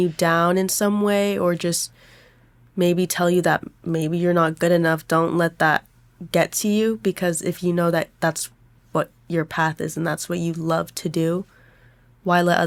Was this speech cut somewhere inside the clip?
no; 0 cuts

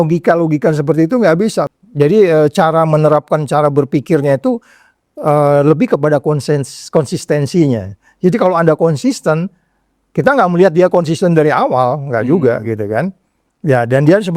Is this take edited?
yes; 1 cut; at 1.7 s

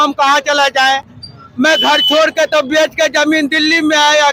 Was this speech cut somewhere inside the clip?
no; 0 cuts

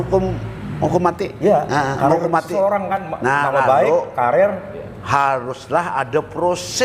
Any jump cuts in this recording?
no; 0 cuts

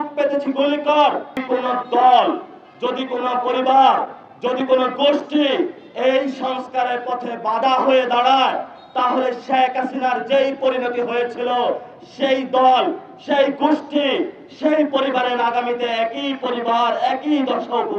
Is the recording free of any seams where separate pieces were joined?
no; 1 cut; at 1.4 s

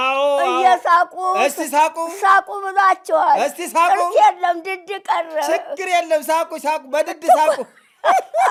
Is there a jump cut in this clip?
no; 0 cuts

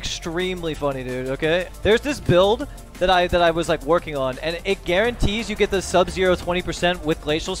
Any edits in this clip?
yes; 2 cuts; at 1.7 s, 4.6 s

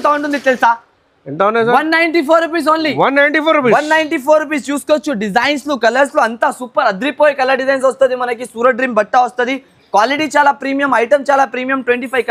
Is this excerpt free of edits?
yes; 0 cuts

